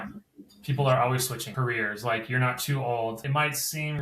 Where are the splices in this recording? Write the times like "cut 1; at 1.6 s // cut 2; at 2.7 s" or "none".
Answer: cut 1; at 1.4 s // cut 2; at 3.2 s